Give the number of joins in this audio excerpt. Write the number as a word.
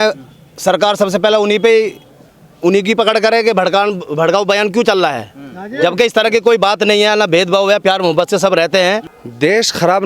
one